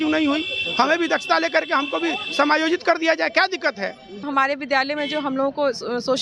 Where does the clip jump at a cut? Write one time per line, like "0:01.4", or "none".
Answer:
0:04.2